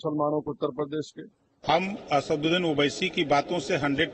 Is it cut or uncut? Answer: cut